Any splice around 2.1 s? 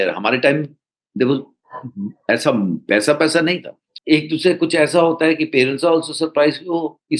no; 1 cut; at 3.9 s

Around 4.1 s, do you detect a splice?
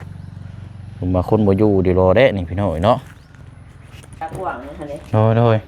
yes; 1 cut; at 4.1 s

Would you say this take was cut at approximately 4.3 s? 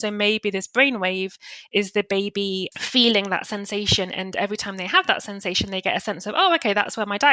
no; 1 cut; at 2.7 s

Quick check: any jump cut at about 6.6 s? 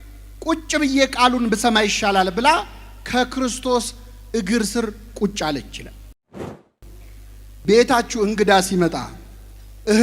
yes; 1 cut; at 6.6 s

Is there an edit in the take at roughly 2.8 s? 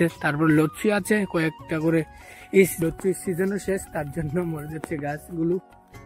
yes; 1 cut; at 2.8 s

